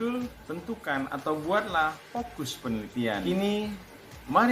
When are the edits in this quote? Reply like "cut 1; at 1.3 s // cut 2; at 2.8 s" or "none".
cut 1; at 3.2 s